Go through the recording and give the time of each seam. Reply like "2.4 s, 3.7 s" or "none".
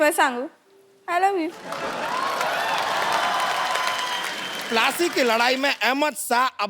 4.7 s

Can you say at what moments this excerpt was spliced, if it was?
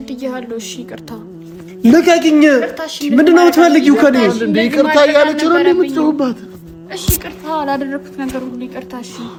none

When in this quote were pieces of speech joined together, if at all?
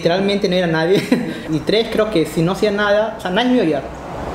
1.4 s

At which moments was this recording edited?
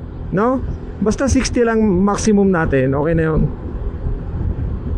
none

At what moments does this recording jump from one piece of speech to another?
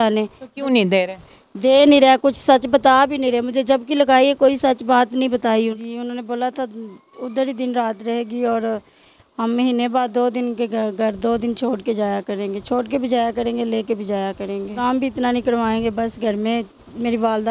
5.5 s, 14.8 s

